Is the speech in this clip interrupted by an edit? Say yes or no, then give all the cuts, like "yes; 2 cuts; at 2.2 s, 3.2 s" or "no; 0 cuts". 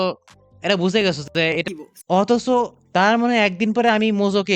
yes; 1 cut; at 1.6 s